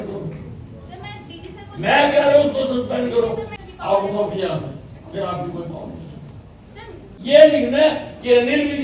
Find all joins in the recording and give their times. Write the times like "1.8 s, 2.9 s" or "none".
3.5 s, 7.1 s